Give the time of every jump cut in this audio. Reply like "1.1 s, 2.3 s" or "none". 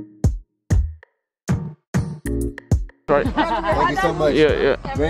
3.0 s